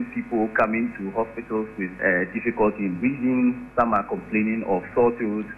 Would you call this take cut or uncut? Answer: cut